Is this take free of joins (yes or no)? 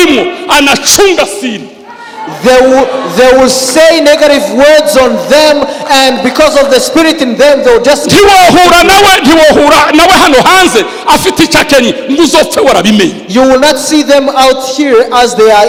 yes